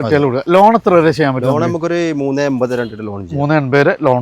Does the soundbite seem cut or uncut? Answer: uncut